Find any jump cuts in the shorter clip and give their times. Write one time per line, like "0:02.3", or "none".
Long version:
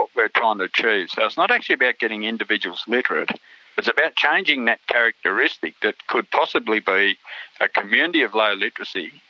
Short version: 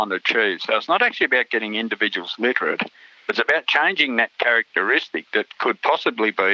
none